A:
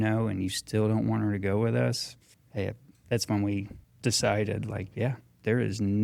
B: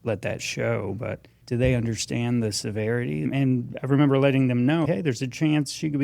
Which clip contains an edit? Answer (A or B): B